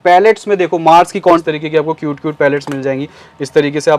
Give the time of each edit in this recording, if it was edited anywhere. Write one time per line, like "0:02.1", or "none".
0:01.4